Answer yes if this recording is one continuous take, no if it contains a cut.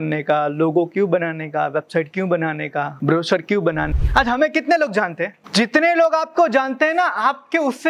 no